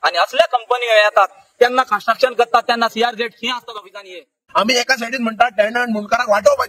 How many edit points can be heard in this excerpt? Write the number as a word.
one